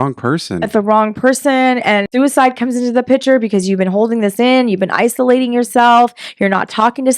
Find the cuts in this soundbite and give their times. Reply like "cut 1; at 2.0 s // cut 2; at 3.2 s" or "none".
cut 1; at 2.1 s